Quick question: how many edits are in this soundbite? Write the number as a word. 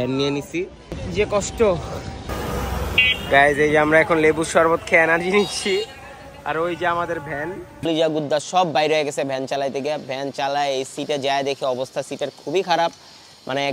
two